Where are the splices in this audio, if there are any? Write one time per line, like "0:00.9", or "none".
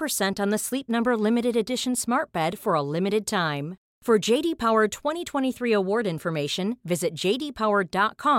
none